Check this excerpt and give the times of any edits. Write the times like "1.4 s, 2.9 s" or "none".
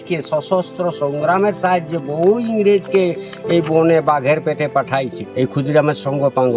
5.2 s